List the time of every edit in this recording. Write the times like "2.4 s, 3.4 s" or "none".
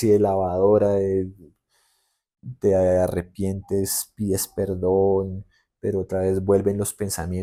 none